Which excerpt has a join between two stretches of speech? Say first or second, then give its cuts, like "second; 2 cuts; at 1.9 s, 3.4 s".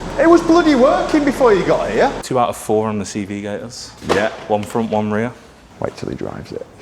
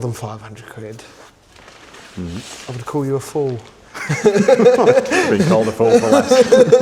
first; 1 cut; at 2.2 s